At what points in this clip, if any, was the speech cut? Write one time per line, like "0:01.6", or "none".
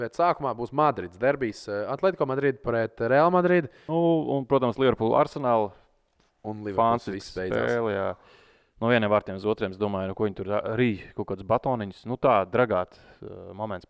0:03.8